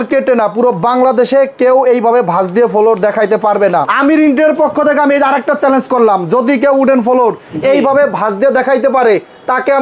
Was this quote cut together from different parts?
yes; 1 cut; at 3.9 s

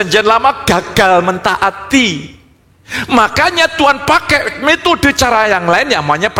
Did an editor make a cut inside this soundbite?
no; 0 cuts

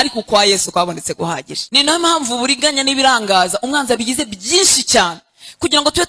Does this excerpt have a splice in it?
yes; 1 cut; at 1.5 s

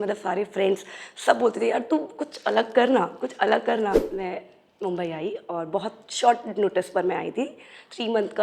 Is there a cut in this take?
yes; 1 cut; at 4.1 s

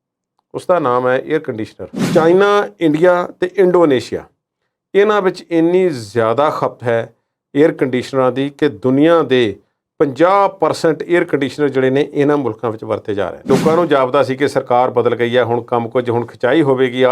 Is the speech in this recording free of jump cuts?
no; 2 cuts; at 2.0 s, 13.5 s

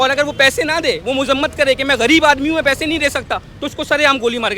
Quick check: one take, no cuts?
yes; 0 cuts

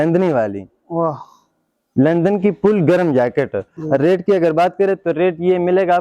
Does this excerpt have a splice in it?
yes; 1 cut; at 3.7 s

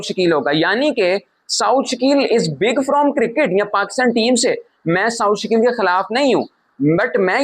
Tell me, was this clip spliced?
no; 0 cuts

